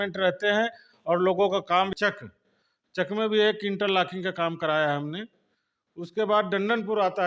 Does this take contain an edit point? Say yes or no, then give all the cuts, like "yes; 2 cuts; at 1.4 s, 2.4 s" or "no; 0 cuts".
yes; 1 cut; at 1.9 s